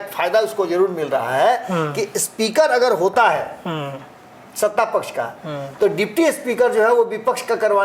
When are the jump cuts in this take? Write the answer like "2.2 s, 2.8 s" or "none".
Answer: none